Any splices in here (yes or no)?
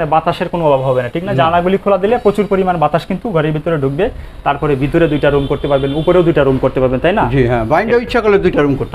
yes